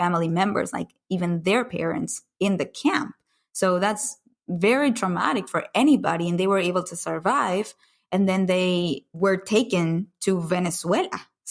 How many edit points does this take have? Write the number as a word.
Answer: one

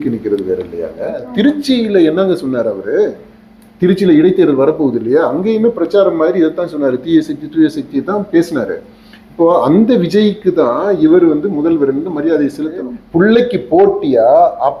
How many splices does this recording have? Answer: two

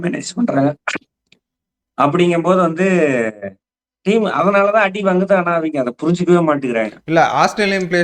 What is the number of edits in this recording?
zero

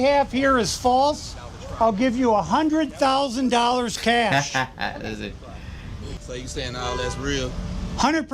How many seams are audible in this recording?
one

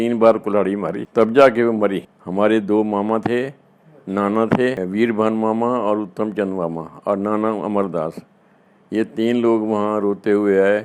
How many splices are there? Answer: one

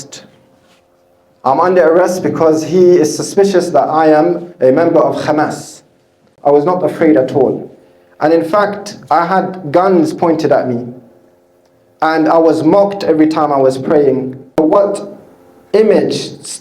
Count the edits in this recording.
two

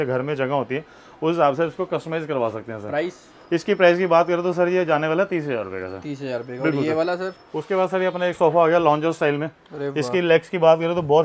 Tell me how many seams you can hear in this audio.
zero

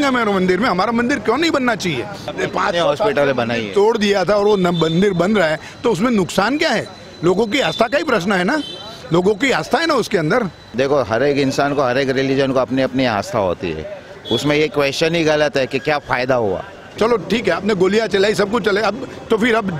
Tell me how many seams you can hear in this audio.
three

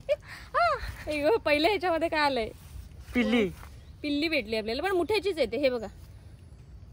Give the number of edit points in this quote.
one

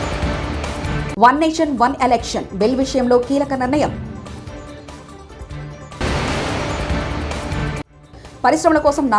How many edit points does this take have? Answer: one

